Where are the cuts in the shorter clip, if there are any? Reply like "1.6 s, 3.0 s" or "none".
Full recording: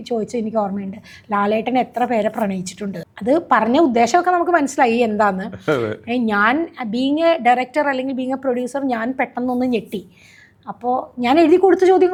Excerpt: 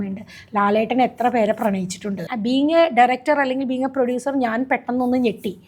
2.3 s